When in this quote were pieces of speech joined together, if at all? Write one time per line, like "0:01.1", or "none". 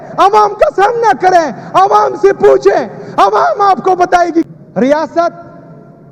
0:04.5

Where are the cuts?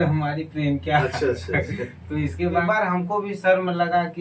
0:02.6

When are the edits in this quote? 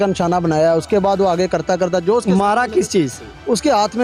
none

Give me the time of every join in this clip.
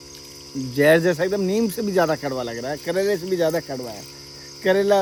none

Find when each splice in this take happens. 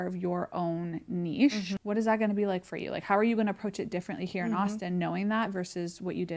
0:01.7

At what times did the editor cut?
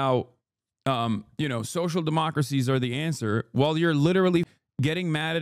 0:04.5

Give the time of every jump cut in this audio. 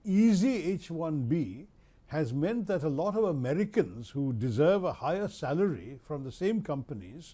none

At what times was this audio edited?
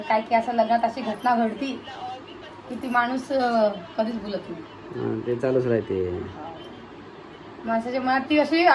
none

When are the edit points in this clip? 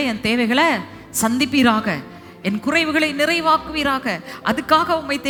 none

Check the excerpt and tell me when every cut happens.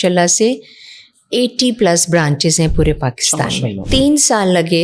0:03.8

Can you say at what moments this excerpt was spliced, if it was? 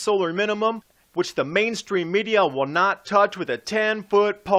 0:02.9

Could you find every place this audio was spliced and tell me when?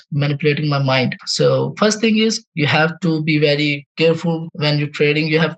0:01.2

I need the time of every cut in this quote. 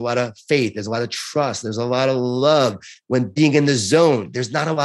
0:02.9

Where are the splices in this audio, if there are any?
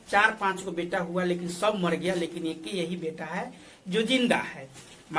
none

